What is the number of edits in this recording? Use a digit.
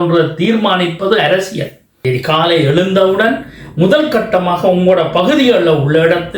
1